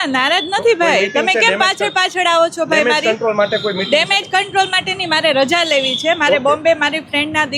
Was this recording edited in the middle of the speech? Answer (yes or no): no